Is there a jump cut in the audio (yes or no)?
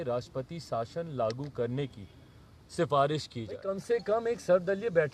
yes